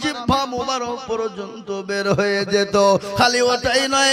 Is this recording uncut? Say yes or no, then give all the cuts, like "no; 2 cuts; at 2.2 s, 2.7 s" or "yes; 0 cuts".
yes; 0 cuts